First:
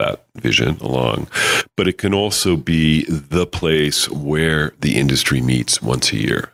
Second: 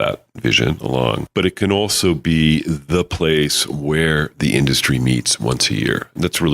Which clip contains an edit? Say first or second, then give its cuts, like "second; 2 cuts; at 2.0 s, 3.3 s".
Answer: second; 1 cut; at 1.3 s